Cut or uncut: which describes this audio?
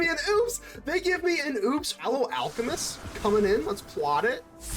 cut